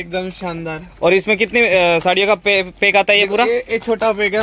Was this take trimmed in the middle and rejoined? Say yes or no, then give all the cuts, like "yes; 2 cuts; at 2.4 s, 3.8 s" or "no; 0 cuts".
no; 0 cuts